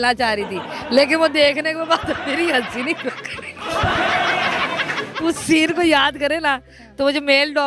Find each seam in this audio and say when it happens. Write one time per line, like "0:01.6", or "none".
none